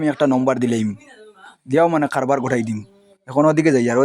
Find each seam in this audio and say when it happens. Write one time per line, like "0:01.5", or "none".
none